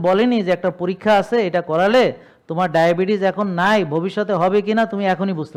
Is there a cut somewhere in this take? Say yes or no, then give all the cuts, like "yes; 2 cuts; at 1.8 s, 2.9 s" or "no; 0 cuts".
no; 0 cuts